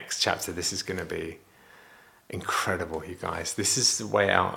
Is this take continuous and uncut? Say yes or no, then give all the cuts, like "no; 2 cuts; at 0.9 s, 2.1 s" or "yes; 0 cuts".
yes; 0 cuts